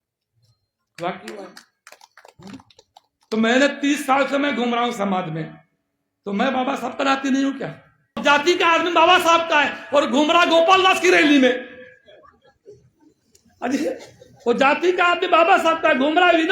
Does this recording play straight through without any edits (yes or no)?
no